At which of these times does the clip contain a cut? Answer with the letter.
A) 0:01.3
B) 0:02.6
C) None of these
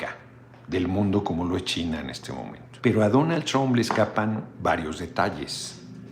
B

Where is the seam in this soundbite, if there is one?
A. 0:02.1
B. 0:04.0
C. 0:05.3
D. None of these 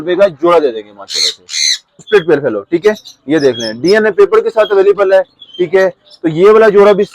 A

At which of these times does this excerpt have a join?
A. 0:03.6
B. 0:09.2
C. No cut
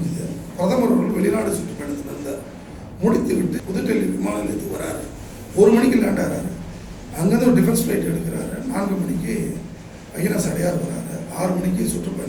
A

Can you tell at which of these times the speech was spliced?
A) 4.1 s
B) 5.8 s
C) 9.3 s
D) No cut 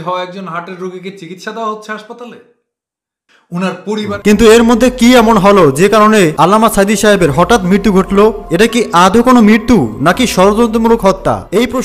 A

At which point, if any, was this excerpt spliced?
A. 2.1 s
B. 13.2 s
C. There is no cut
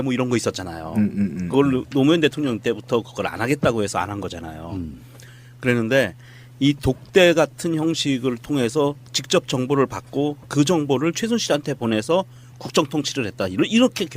A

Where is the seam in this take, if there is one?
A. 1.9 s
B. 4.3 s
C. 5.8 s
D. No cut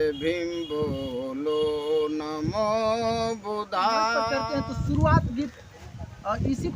B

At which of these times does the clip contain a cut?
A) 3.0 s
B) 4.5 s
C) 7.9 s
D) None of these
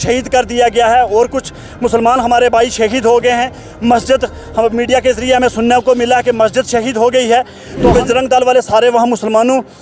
C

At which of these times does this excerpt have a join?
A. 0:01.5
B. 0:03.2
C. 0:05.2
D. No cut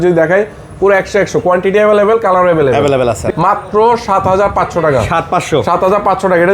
B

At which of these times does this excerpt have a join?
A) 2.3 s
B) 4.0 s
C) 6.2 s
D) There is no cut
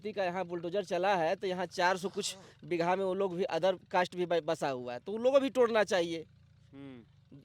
D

